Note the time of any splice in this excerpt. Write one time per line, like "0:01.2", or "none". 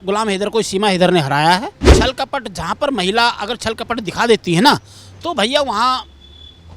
0:01.8